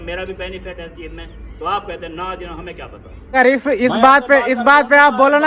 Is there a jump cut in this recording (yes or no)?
yes